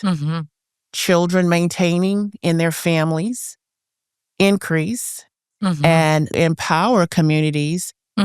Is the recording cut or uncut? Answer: cut